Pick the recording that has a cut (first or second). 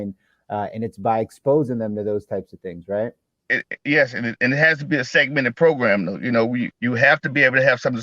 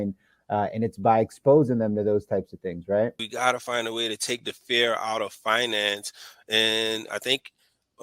second